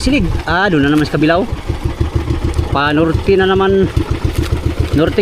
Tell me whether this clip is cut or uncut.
uncut